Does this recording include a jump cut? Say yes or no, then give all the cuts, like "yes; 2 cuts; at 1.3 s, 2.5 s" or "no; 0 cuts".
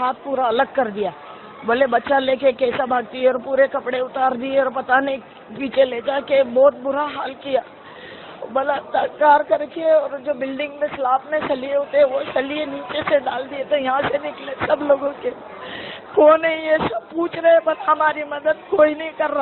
no; 0 cuts